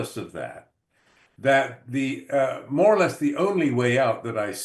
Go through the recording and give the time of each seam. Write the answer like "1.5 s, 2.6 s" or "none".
none

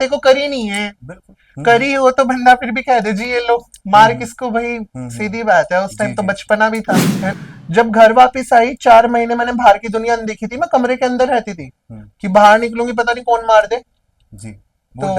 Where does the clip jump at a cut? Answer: 7.2 s

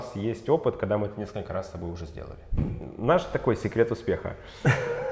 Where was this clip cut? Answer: 2.7 s

